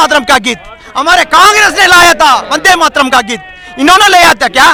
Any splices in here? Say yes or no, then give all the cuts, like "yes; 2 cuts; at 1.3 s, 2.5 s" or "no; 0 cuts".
no; 0 cuts